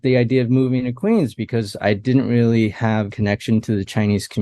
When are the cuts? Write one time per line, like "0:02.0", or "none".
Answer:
0:03.1